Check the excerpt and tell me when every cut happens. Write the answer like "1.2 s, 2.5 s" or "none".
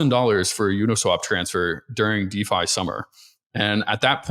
none

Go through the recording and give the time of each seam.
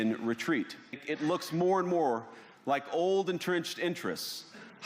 1.0 s

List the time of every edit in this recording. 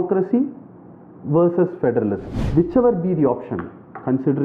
2.4 s

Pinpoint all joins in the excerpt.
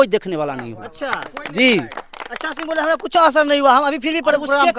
none

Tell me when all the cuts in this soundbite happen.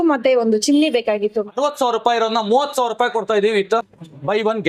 1.5 s

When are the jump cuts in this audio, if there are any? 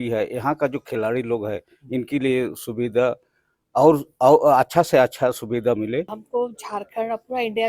6.2 s

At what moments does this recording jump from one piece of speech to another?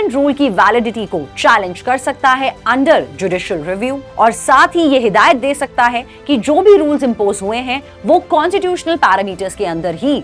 none

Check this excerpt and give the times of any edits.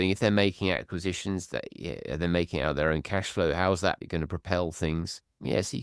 none

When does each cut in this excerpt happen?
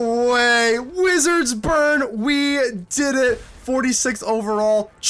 none

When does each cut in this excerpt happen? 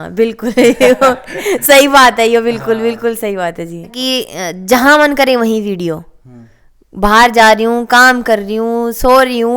4.0 s

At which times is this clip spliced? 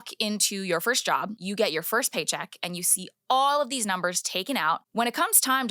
1.4 s

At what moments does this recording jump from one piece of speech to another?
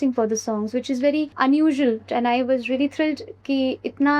1.3 s, 2.1 s

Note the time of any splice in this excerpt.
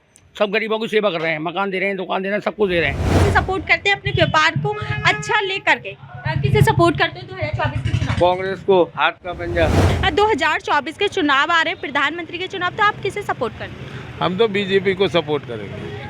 3.2 s, 9.9 s

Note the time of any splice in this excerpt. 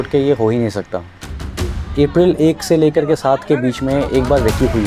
none

